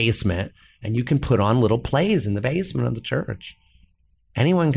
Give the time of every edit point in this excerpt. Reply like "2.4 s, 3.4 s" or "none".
none